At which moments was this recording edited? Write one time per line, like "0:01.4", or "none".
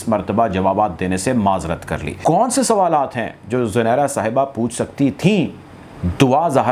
0:02.2